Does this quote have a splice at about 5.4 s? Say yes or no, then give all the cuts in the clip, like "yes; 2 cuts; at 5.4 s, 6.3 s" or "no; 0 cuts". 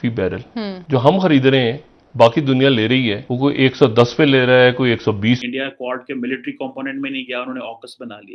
yes; 1 cut; at 5.4 s